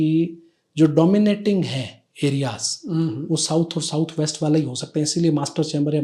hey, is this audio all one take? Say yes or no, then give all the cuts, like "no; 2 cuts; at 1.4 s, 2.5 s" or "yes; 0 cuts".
yes; 0 cuts